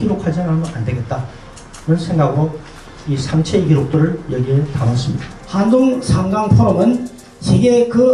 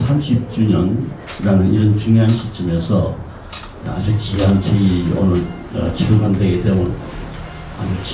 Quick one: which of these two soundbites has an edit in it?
first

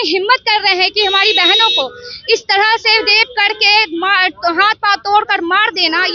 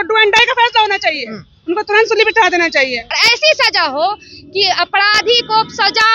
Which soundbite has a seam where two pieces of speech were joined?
second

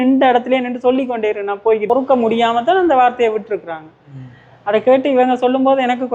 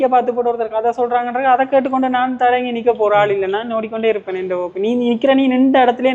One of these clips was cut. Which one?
first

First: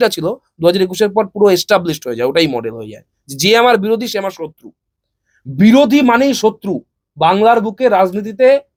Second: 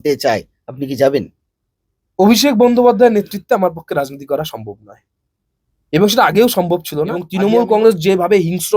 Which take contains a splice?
second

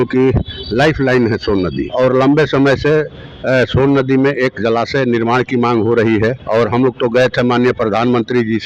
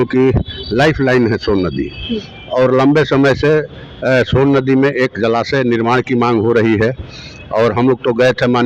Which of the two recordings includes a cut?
first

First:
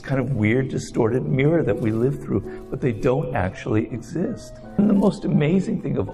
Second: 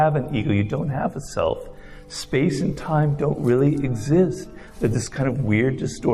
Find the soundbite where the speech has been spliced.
first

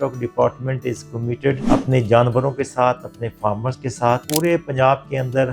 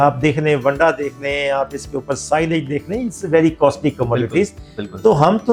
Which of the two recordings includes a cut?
first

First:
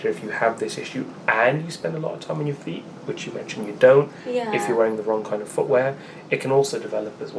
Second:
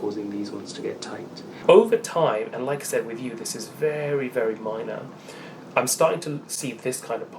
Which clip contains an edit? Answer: second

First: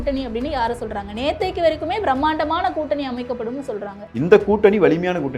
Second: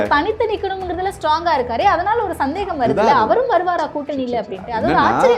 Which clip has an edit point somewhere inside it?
first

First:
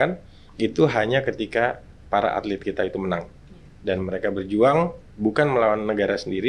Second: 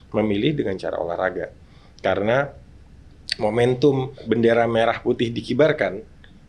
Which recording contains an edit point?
second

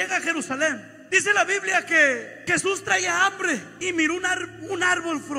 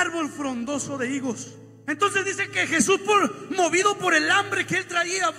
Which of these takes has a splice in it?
first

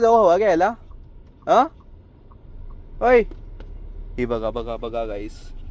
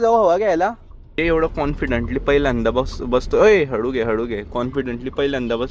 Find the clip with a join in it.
second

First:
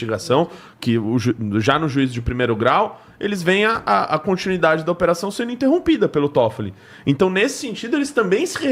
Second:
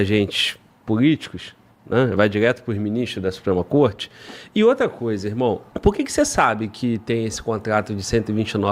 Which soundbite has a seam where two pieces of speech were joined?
second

